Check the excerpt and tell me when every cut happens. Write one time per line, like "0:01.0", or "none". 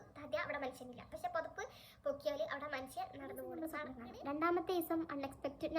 0:03.6